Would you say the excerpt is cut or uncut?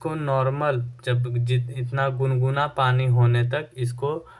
uncut